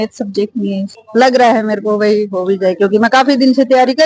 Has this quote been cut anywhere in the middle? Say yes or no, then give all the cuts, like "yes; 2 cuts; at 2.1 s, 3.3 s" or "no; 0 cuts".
yes; 1 cut; at 0.9 s